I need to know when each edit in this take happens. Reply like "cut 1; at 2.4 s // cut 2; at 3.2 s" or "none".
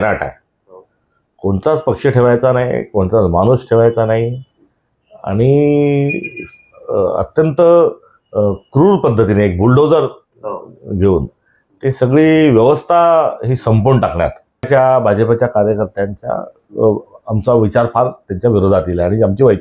cut 1; at 14.7 s